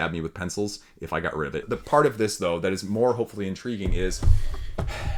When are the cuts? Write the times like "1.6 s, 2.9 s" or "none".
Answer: none

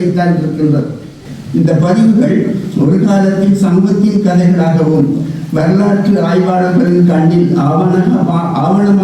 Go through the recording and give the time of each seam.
1.2 s

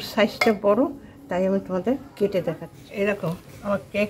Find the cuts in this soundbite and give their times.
2.8 s

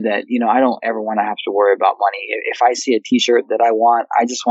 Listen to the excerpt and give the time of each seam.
none

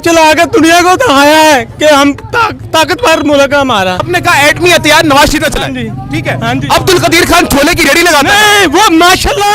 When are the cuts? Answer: 2.6 s, 4.1 s

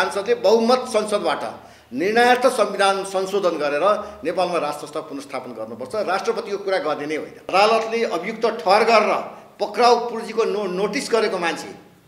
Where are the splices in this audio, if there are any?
7.4 s

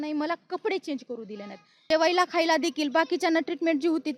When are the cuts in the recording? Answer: 1.9 s

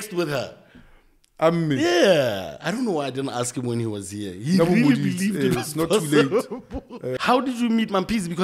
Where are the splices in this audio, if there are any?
7.1 s

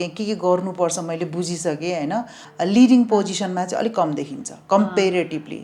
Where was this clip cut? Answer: 2.4 s

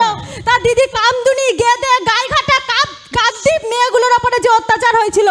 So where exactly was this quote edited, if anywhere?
none

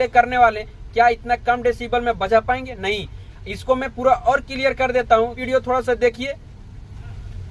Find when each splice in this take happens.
5.4 s

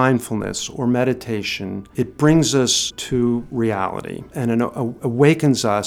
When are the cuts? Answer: 1.8 s, 3.0 s, 4.3 s

